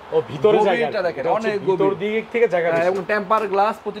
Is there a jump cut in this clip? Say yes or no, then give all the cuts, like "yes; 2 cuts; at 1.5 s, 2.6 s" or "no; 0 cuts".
no; 0 cuts